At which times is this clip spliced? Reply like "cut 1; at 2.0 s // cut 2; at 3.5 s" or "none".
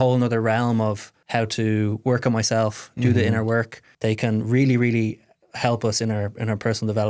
cut 1; at 1.1 s // cut 2; at 3.8 s

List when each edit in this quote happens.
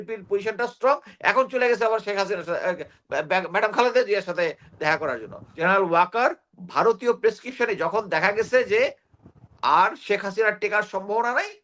cut 1; at 5.5 s

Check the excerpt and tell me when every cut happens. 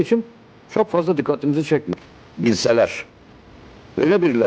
cut 1; at 1.9 s

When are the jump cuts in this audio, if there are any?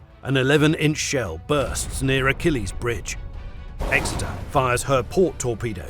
cut 1; at 3.6 s

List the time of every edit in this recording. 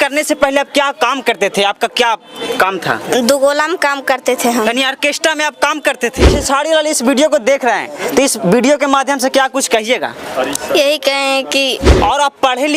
cut 1; at 6.3 s // cut 2; at 11.9 s

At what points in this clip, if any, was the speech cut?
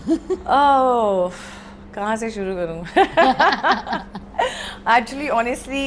none

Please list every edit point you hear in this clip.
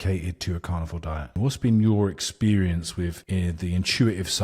cut 1; at 1.3 s

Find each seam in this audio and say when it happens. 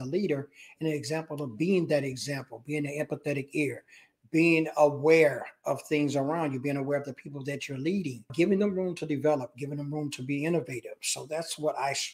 cut 1; at 8.2 s

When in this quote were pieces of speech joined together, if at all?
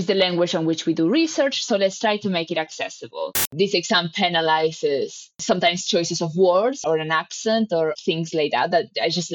cut 1; at 3.5 s

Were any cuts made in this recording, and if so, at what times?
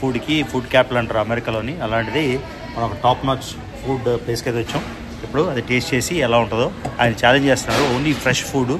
none

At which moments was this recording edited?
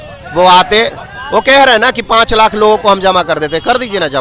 none

